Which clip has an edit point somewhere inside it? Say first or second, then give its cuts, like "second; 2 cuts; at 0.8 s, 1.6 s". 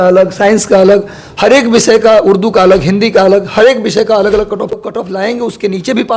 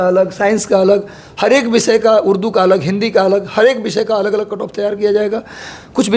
first; 1 cut; at 4.7 s